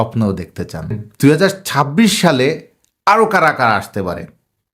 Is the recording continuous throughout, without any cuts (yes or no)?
no